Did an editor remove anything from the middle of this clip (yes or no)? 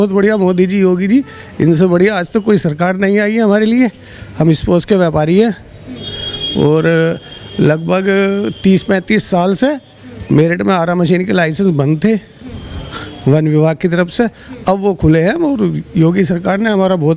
no